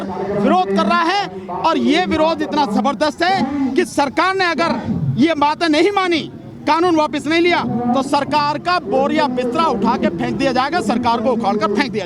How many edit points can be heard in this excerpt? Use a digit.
0